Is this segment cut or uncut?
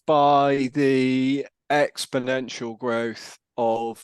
cut